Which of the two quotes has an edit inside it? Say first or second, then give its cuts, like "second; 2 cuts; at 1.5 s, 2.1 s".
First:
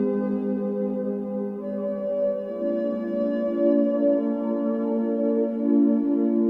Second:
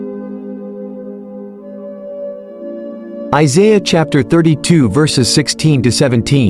second; 1 cut; at 3.3 s